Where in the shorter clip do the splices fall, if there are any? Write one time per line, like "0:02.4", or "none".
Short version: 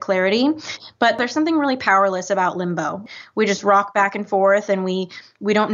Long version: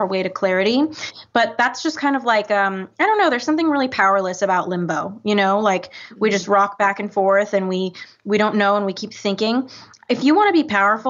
0:01.2
0:03.0